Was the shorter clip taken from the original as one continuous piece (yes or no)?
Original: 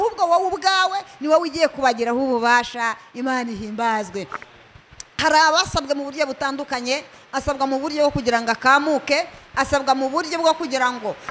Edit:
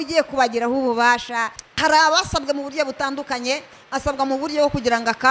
no